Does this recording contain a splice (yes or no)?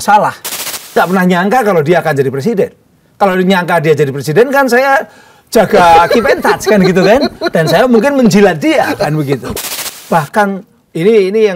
yes